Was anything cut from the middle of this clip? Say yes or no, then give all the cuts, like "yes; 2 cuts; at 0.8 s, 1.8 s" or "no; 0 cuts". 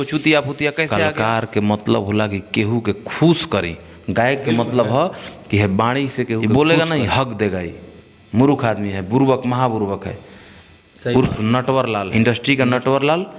yes; 3 cuts; at 1.0 s, 6.4 s, 12.1 s